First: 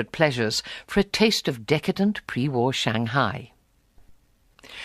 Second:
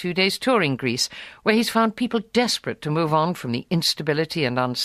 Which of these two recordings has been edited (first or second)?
second